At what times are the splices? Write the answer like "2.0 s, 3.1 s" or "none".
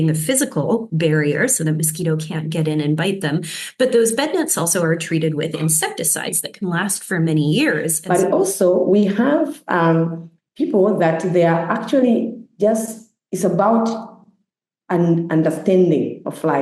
8.0 s